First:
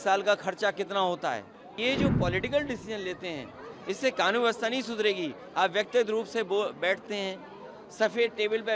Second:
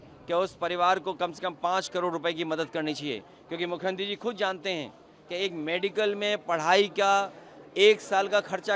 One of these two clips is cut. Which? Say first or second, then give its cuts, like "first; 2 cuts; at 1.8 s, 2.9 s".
first; 1 cut; at 1.8 s